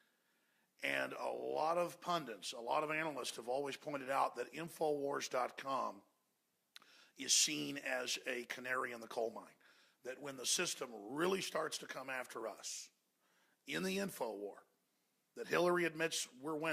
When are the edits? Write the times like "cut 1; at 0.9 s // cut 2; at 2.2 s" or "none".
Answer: cut 1; at 2.8 s